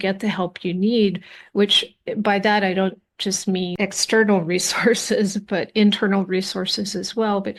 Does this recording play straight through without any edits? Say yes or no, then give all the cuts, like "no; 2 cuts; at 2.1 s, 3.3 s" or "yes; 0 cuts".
yes; 0 cuts